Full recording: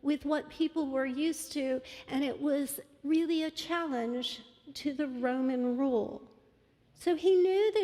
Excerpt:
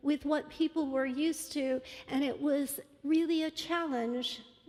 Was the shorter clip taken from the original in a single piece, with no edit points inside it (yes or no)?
yes